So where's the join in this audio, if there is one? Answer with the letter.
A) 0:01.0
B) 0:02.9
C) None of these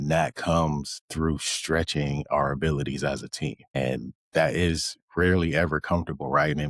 C